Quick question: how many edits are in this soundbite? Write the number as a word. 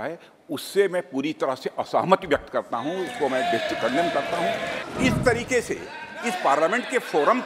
one